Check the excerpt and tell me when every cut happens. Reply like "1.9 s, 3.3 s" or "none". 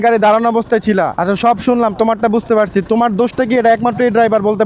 1.1 s